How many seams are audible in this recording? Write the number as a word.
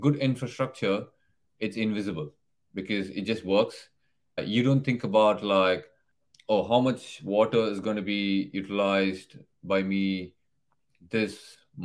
one